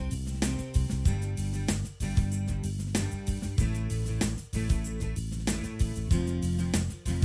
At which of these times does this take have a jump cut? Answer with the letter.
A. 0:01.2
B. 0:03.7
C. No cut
C